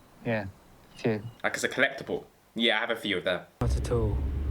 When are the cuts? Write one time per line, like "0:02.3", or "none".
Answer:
0:01.3
0:03.5

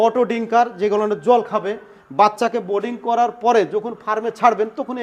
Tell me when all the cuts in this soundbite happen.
none

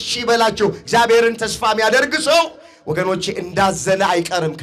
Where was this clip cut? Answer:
none

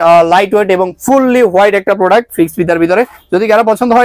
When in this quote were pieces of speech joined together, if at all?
none

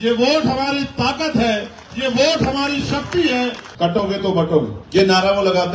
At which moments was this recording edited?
0:03.6
0:04.8

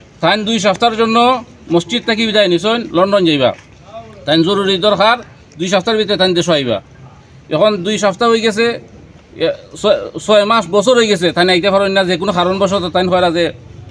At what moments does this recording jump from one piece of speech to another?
none

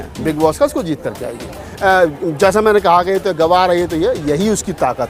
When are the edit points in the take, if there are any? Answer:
0:01.7

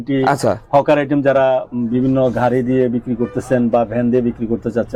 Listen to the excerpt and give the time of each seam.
none

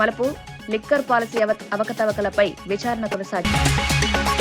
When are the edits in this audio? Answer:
0:03.4

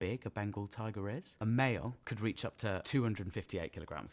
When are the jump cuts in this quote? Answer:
0:01.3
0:02.3

